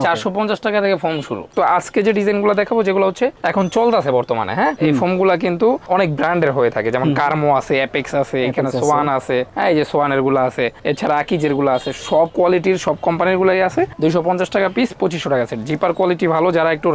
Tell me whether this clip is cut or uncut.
cut